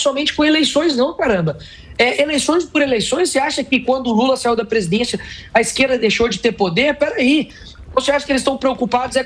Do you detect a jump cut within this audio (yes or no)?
no